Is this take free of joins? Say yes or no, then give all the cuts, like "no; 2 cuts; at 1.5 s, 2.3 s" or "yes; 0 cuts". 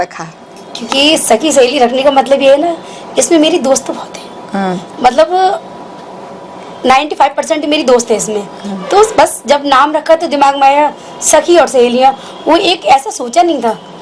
yes; 0 cuts